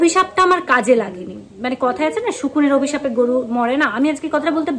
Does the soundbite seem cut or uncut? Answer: uncut